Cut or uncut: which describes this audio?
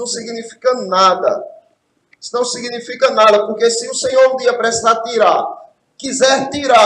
uncut